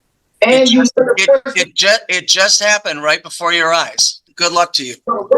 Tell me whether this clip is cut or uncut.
cut